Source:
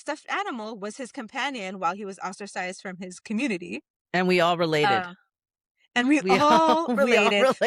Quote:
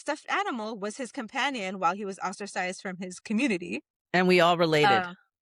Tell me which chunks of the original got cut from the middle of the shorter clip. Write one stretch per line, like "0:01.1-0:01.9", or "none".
none